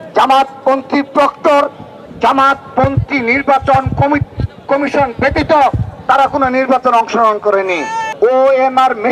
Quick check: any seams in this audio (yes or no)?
yes